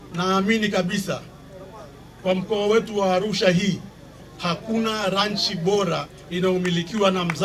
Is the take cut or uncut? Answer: uncut